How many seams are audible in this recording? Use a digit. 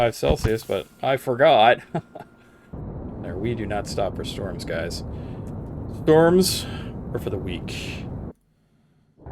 2